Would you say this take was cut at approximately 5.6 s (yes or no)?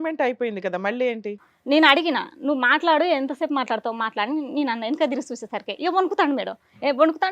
no